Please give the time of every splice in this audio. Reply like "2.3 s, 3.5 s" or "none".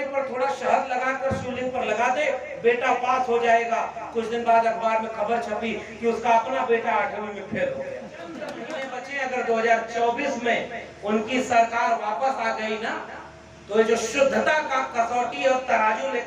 8.6 s